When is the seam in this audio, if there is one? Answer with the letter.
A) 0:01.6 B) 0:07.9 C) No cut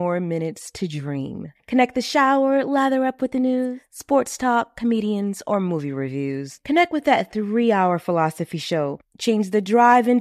C